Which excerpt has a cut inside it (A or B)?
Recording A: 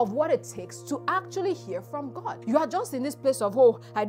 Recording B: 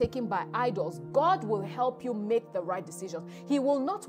A